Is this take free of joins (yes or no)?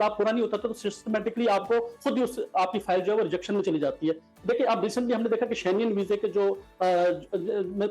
yes